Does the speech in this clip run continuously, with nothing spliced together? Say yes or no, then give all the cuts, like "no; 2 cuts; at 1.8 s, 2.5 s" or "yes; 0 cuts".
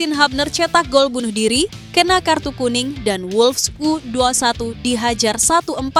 yes; 0 cuts